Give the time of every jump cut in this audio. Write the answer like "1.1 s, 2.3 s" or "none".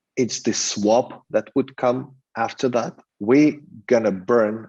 3.0 s